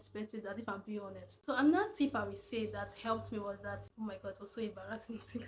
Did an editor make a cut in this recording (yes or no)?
yes